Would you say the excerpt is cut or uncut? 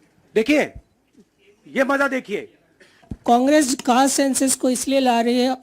cut